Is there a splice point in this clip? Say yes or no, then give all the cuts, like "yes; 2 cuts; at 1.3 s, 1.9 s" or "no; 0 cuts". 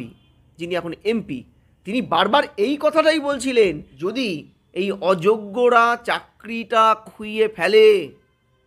yes; 1 cut; at 3.9 s